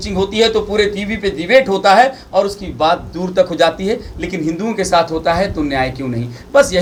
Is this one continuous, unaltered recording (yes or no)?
yes